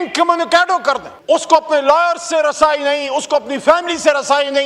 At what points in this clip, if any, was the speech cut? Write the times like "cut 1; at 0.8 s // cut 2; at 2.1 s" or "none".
cut 1; at 1.1 s